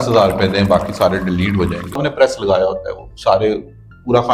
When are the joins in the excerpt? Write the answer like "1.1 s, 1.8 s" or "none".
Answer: 2.1 s

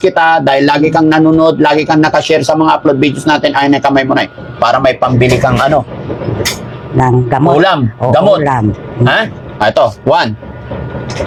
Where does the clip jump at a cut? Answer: none

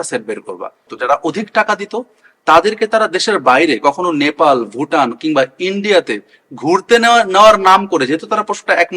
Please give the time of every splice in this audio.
0.9 s

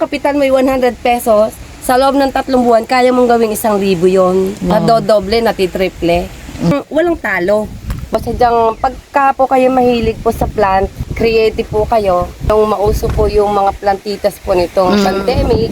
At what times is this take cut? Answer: 4.7 s, 6.7 s, 8.1 s, 11.0 s, 12.5 s

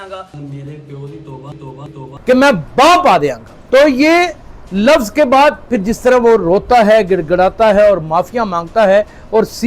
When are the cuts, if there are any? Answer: 2.0 s, 3.5 s

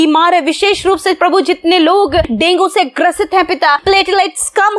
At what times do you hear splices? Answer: 2.3 s, 3.8 s

